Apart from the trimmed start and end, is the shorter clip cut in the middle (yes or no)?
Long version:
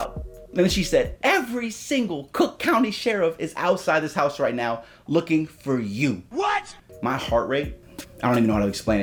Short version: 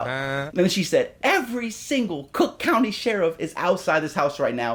no